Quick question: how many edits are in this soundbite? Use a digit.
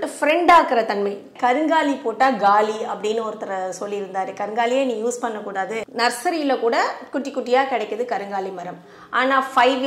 2